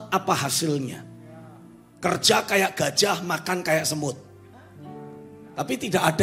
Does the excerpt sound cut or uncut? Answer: uncut